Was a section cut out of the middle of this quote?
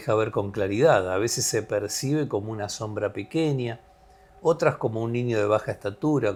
no; 0 cuts

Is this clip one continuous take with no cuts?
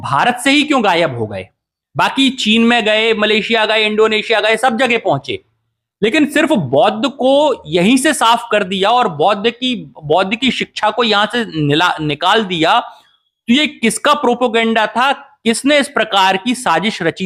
yes; 0 cuts

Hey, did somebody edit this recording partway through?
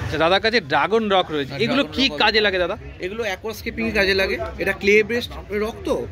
no; 0 cuts

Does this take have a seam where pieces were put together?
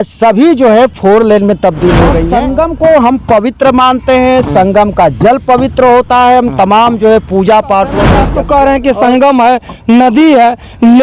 yes; 2 cuts; at 2.3 s, 8.3 s

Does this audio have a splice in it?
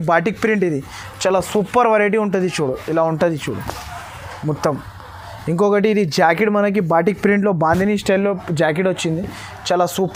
no; 0 cuts

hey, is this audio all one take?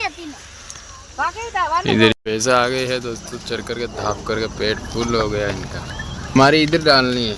no; 2 cuts; at 2.1 s, 6.4 s

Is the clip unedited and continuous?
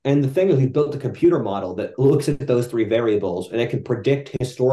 yes; 0 cuts

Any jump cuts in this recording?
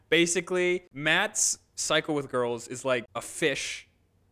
yes; 2 cuts; at 0.9 s, 3.1 s

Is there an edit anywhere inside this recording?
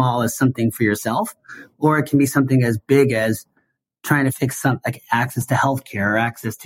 yes; 1 cut; at 4.4 s

